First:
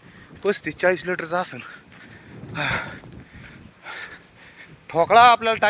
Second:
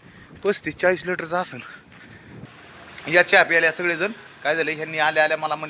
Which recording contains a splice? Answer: second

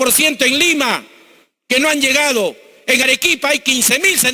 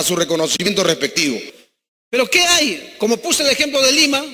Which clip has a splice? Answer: second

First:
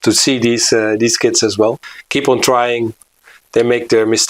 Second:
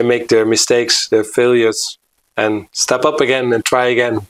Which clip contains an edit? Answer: first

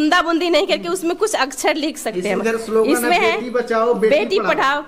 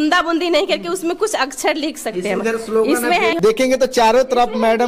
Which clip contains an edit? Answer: second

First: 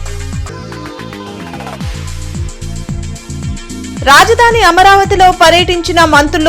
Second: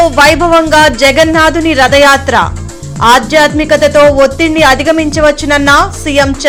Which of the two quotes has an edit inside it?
first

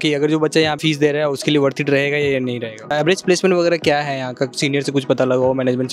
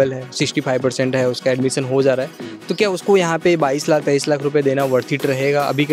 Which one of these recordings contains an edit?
first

